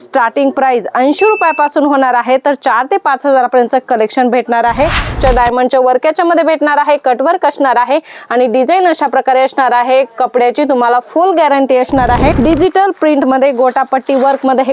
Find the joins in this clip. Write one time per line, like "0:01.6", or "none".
0:05.1
0:12.4